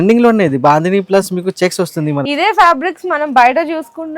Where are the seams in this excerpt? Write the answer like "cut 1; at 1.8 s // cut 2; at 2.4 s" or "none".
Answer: cut 1; at 2.2 s